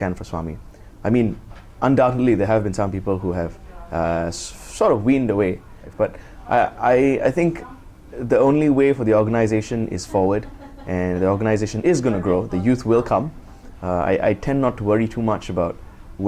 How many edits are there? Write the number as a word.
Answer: one